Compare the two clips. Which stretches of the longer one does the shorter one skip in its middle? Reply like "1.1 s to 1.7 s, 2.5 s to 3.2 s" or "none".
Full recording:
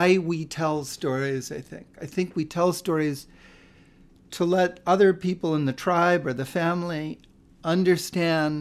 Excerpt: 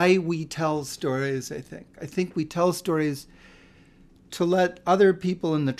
none